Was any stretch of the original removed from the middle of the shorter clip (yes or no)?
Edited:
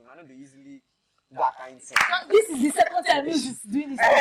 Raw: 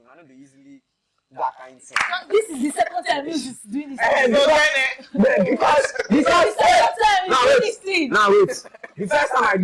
no